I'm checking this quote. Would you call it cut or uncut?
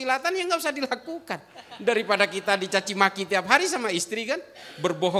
uncut